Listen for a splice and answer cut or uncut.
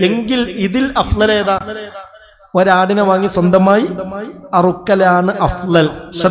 uncut